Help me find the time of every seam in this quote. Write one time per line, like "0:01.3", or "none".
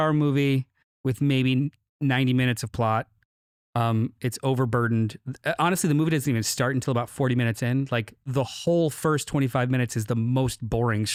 none